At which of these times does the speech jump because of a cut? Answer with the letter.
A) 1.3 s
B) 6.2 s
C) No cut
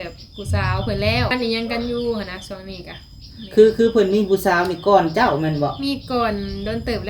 A